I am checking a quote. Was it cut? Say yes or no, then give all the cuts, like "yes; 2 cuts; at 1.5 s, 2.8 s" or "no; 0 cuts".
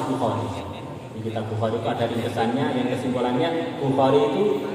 no; 0 cuts